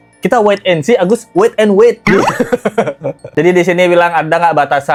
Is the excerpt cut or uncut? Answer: uncut